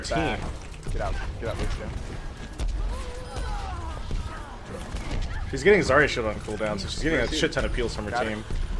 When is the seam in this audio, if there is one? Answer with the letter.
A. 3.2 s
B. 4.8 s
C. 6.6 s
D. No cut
A